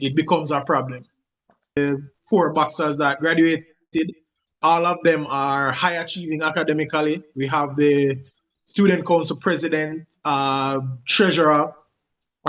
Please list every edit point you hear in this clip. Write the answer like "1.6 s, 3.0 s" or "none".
1.8 s